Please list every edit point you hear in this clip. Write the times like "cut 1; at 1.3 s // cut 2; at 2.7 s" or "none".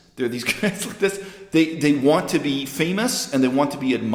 none